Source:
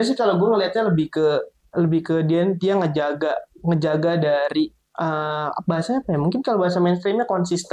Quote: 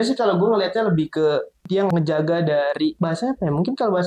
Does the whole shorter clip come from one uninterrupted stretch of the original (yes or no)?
no